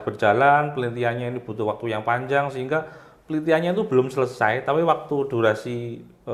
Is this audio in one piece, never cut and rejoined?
yes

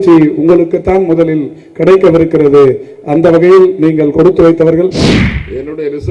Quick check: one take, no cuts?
no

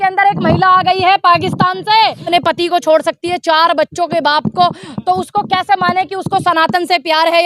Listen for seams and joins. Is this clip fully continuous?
no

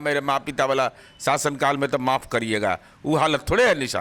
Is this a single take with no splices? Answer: yes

